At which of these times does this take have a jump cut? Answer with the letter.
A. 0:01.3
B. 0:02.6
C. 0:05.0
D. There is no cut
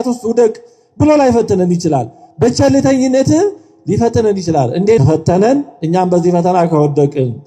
C